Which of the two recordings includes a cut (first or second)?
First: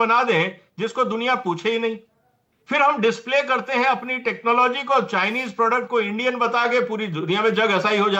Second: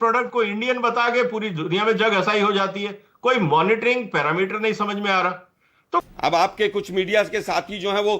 second